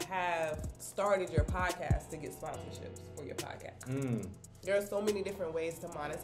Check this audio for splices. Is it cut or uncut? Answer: uncut